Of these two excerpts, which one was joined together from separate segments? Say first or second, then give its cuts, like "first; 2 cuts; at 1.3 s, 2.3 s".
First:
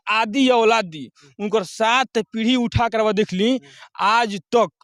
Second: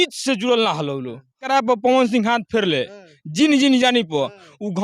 second; 1 cut; at 1.4 s